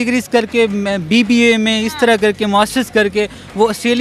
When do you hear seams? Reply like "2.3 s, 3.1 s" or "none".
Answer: none